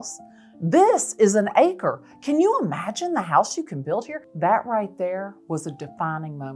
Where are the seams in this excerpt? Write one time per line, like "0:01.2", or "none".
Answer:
0:04.2

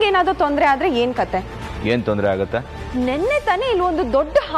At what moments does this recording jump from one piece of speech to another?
0:02.8

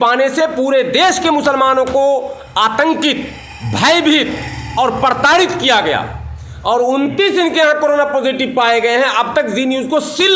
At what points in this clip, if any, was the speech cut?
none

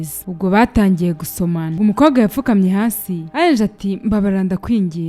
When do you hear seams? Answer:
0:01.7

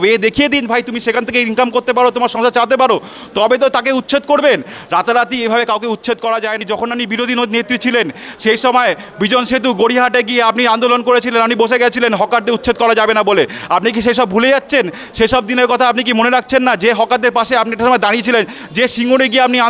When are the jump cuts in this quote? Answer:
0:06.6

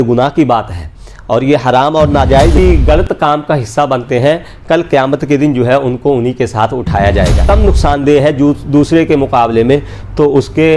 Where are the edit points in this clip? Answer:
0:02.6
0:07.4

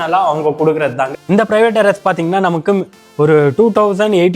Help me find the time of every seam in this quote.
0:01.1

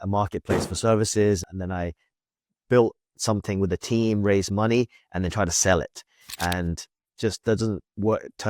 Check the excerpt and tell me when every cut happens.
0:01.5

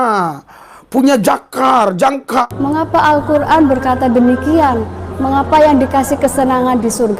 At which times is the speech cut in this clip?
0:02.4

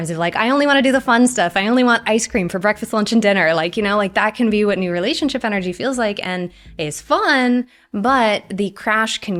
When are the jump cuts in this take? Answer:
none

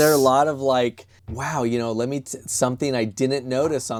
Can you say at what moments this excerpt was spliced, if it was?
none

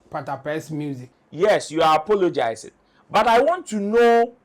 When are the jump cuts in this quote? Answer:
0:01.1

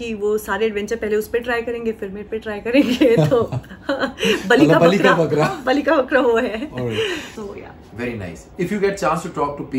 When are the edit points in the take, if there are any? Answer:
0:07.3

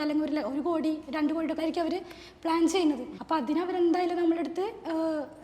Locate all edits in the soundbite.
0:01.6
0:03.1

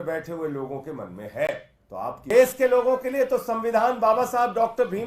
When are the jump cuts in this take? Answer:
0:02.3

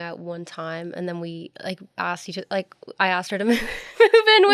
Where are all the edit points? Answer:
none

